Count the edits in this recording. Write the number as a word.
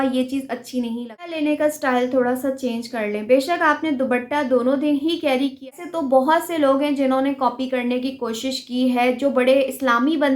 two